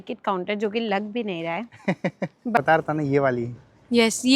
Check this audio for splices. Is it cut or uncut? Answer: cut